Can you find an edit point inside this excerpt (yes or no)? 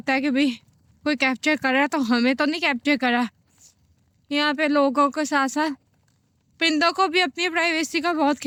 no